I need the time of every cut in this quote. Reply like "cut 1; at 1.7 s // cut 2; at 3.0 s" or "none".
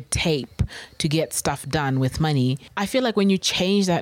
cut 1; at 2.7 s